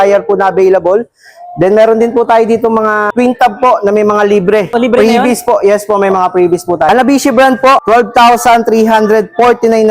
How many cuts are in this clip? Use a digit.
4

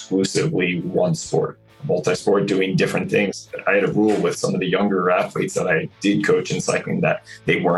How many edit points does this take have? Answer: 2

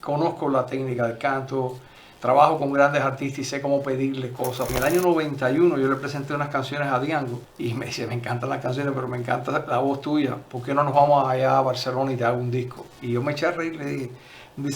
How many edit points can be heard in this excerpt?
2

